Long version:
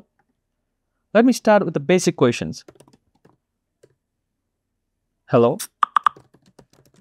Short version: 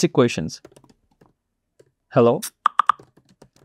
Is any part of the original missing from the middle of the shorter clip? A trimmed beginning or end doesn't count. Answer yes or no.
yes